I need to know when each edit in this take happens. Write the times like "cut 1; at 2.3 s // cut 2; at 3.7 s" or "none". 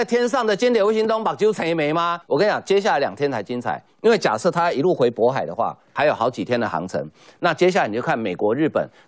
cut 1; at 2.2 s // cut 2; at 5.9 s